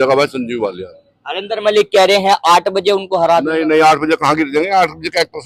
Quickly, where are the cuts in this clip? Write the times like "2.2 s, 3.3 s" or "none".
none

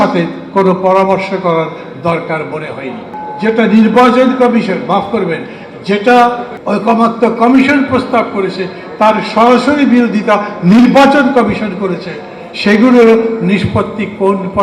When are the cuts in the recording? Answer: none

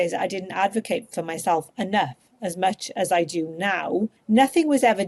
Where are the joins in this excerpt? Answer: 4.2 s

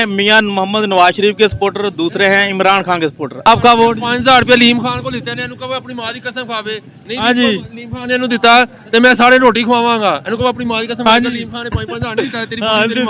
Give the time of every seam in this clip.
3.5 s

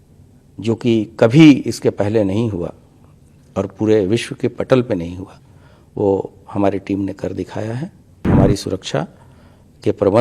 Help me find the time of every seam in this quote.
8.2 s

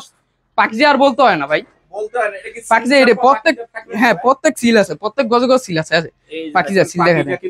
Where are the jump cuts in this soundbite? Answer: none

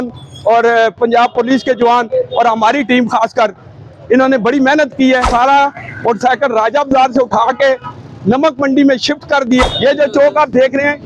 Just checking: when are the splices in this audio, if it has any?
5.3 s, 9.6 s

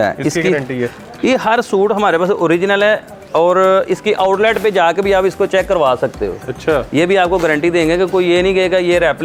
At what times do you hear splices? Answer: none

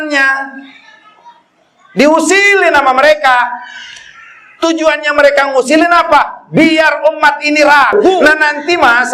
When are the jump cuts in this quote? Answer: 8.2 s

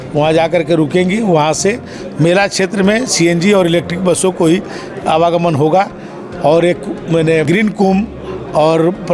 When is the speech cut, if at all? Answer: 7.5 s

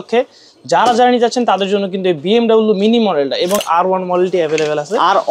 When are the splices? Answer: 3.6 s

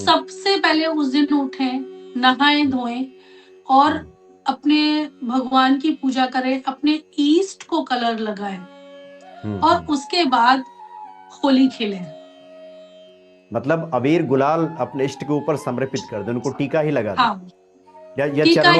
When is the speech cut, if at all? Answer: none

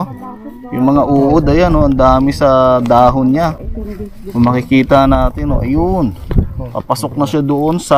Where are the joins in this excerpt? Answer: none

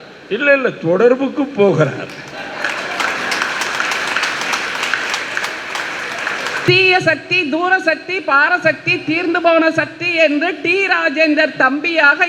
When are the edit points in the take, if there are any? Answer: 6.5 s

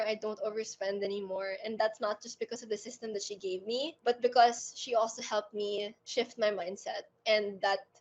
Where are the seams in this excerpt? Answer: none

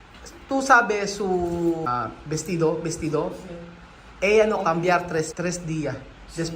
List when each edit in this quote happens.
1.9 s, 5.3 s

